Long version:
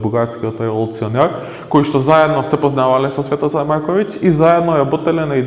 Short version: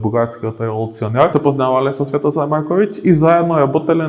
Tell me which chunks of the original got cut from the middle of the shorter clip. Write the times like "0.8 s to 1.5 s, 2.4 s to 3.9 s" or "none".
1.3 s to 2.5 s

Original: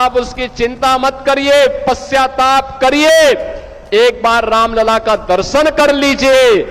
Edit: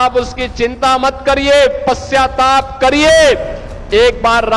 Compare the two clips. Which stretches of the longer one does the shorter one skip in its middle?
none

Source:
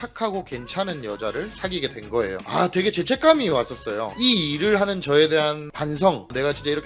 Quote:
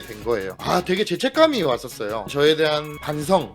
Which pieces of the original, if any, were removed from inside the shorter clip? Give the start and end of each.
4.1 s to 5.0 s

